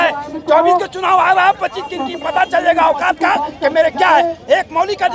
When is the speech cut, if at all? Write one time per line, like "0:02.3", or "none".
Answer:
none